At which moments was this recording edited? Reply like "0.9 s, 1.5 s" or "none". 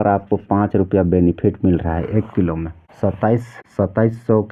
none